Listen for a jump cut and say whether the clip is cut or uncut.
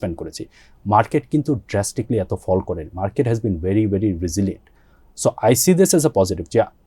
uncut